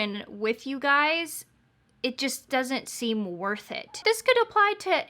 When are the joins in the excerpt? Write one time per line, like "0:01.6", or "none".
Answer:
0:04.0

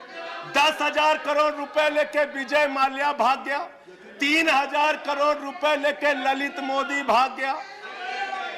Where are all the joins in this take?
none

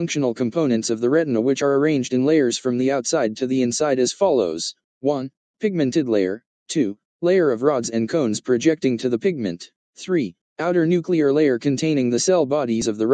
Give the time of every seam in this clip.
none

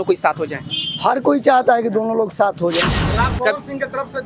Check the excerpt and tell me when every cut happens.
0:03.0

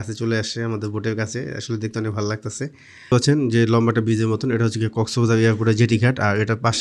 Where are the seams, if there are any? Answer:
0:03.1

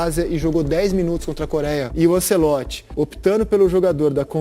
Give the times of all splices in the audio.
0:01.9
0:02.8

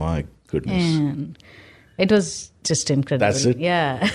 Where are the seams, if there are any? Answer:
none

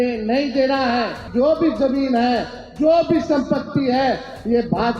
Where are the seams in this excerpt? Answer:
0:01.3

